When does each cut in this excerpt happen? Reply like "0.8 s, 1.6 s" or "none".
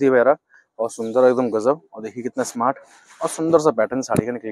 none